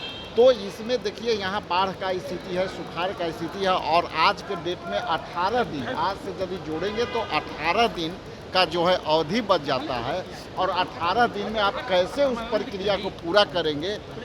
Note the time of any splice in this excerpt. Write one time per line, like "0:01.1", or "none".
none